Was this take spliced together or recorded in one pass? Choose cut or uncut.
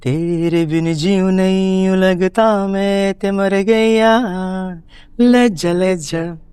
uncut